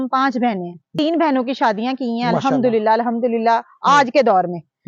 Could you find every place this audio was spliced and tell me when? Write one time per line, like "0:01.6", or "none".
0:00.9